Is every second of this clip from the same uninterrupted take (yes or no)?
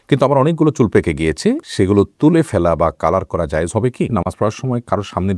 no